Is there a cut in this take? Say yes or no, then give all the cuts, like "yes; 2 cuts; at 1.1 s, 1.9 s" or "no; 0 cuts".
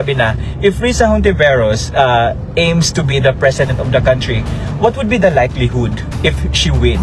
no; 0 cuts